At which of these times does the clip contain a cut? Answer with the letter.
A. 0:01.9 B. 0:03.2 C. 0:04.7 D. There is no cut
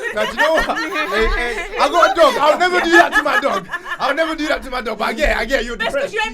D